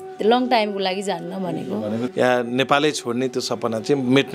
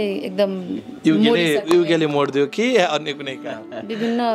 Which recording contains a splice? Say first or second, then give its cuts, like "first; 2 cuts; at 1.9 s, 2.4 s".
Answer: first; 1 cut; at 2.1 s